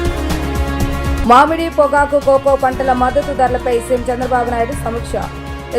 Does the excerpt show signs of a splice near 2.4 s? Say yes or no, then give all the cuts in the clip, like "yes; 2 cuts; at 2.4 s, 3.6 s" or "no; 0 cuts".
no; 1 cut; at 1.1 s